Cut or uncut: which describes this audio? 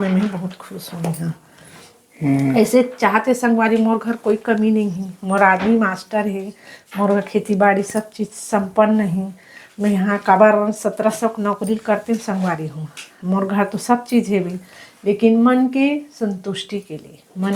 uncut